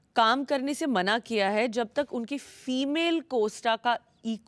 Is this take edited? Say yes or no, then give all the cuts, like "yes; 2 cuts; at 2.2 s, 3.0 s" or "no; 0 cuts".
no; 0 cuts